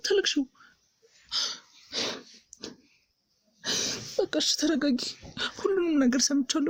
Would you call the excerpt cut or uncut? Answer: uncut